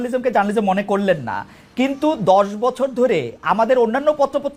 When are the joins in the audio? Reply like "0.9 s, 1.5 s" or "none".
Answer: none